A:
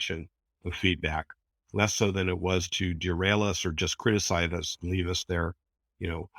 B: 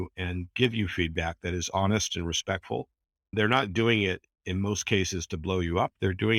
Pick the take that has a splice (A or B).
B